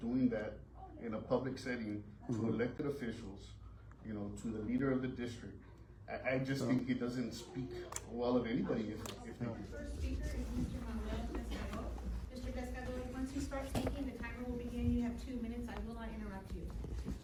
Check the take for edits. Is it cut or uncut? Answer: uncut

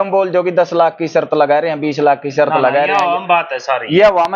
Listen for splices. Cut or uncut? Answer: uncut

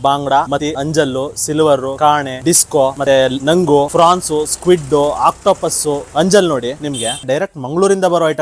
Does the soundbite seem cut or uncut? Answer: cut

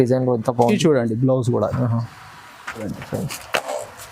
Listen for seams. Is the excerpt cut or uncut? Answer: cut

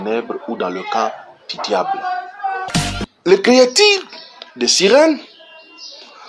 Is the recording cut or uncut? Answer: cut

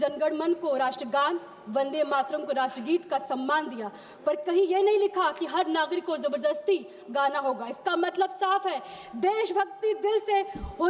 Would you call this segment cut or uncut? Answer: uncut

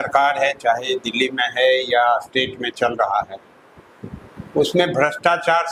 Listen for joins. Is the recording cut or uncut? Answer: uncut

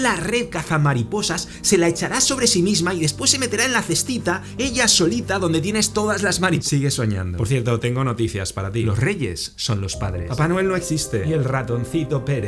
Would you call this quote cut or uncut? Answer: uncut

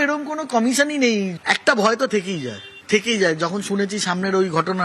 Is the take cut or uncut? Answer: cut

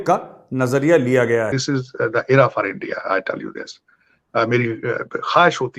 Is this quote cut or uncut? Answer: cut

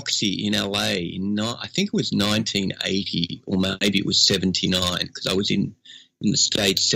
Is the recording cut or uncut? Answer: uncut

